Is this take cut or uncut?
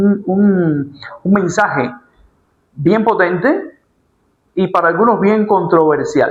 uncut